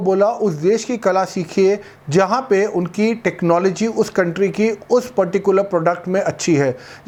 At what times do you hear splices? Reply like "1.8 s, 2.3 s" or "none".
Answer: none